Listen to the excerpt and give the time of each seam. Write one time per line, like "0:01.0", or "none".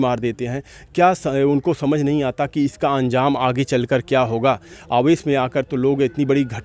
none